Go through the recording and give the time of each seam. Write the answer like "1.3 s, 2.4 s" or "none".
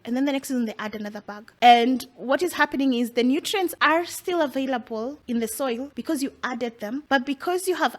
1.5 s, 3.8 s, 5.2 s, 5.9 s, 7.0 s